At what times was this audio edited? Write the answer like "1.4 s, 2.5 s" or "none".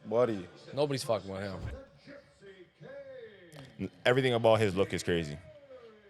1.8 s